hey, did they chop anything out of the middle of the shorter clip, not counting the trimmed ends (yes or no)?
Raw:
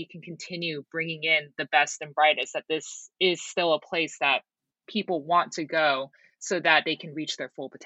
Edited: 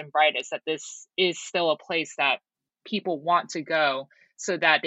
no